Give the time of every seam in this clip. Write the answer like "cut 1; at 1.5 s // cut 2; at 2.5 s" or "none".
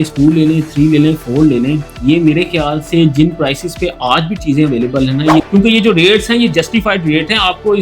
cut 1; at 5.4 s